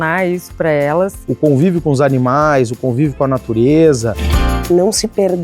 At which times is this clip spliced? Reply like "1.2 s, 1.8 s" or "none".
4.2 s